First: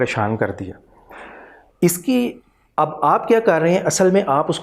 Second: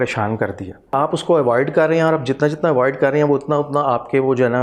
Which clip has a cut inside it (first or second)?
second